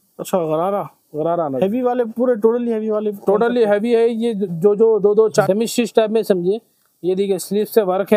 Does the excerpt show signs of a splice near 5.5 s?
yes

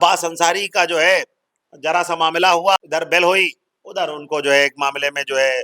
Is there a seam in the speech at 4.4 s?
no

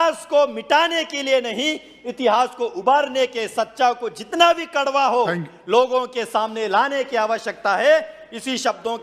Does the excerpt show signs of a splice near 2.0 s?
no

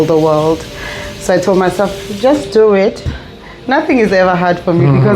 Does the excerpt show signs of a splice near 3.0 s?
yes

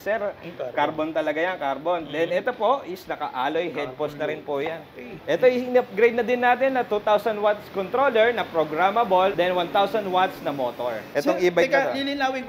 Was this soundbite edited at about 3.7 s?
no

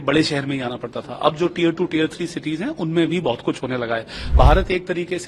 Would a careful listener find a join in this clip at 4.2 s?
yes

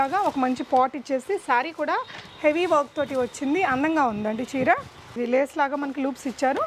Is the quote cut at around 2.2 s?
no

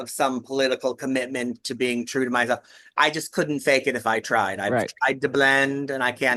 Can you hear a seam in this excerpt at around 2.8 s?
no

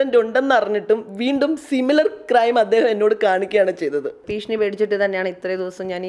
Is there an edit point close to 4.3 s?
yes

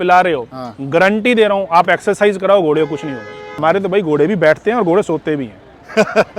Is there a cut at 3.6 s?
yes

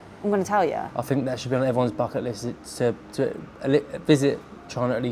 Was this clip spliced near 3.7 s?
no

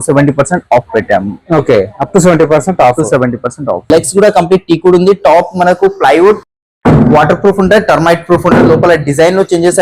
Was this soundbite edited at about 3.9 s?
yes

